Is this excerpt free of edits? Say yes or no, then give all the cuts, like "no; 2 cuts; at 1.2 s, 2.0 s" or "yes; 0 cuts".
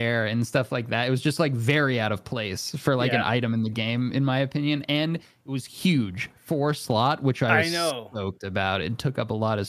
yes; 0 cuts